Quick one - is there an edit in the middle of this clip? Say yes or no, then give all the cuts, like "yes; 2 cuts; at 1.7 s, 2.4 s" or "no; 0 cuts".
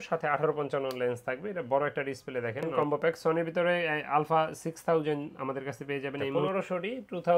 yes; 2 cuts; at 2.7 s, 6.4 s